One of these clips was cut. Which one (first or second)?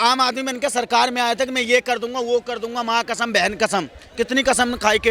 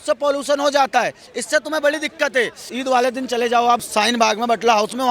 second